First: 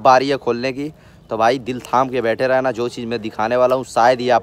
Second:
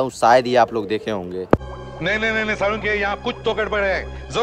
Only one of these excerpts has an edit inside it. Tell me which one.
second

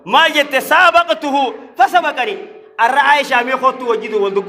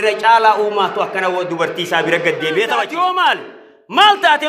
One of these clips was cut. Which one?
second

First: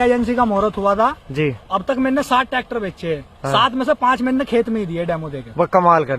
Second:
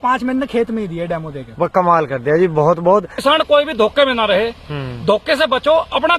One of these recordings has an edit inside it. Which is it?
second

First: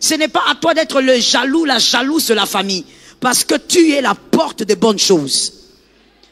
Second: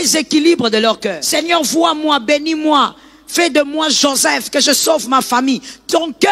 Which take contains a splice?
second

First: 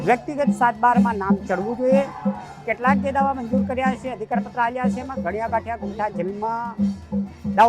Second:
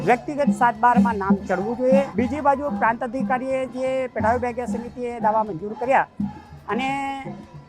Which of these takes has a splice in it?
second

